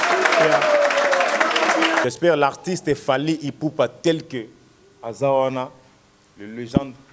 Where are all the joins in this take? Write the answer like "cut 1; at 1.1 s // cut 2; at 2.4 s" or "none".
cut 1; at 2.0 s